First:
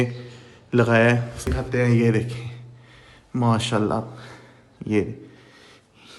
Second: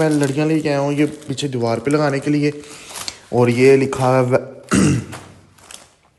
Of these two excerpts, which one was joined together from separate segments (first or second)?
first